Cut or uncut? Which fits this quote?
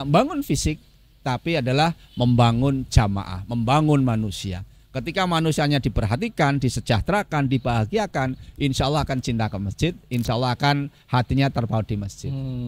uncut